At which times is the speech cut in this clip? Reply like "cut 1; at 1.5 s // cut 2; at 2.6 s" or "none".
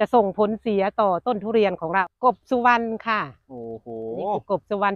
cut 1; at 2.0 s

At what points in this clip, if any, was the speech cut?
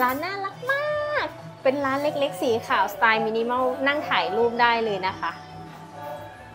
none

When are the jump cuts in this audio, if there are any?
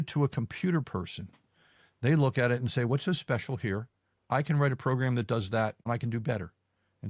cut 1; at 5.9 s

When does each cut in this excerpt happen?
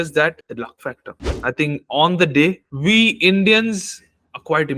none

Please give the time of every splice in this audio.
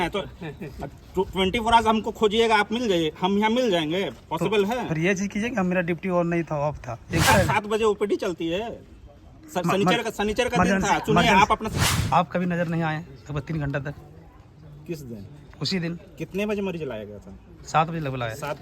cut 1; at 7.3 s // cut 2; at 12.0 s

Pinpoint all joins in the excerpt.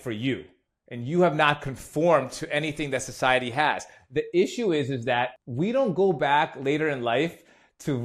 cut 1; at 5.4 s

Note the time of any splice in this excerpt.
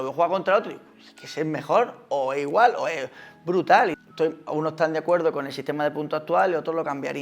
cut 1; at 4.0 s

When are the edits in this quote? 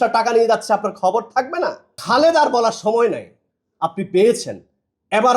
cut 1; at 1.9 s

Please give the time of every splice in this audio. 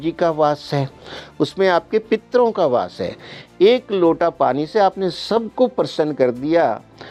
none

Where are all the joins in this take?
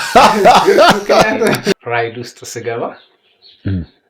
cut 1; at 1.7 s

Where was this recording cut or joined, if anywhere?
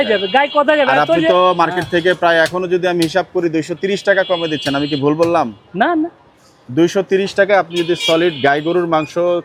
none

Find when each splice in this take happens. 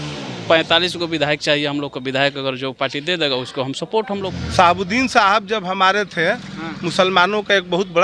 cut 1; at 4.3 s

